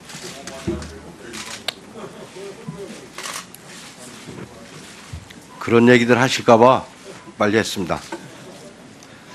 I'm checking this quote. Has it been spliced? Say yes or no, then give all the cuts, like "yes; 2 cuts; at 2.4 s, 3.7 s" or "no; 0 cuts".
no; 0 cuts